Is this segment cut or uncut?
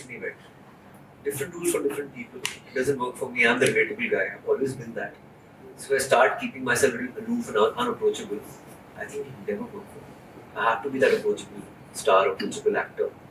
uncut